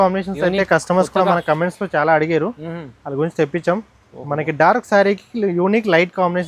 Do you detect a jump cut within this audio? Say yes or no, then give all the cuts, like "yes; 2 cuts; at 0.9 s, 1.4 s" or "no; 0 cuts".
no; 0 cuts